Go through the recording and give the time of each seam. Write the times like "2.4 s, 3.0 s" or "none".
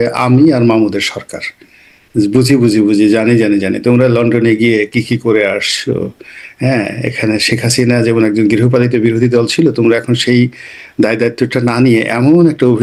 none